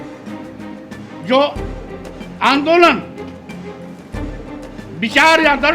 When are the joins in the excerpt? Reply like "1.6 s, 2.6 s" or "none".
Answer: none